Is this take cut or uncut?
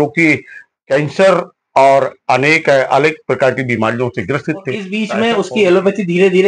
cut